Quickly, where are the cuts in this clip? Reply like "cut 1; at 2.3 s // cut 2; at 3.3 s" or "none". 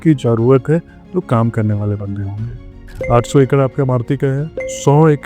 none